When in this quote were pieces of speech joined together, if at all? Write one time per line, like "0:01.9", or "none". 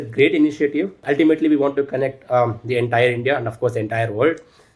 0:01.0